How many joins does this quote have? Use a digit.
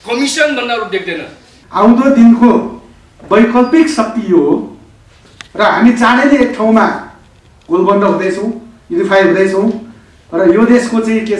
1